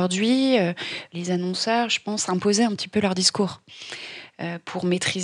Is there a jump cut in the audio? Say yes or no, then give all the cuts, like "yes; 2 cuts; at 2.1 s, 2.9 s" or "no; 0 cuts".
yes; 1 cut; at 1.0 s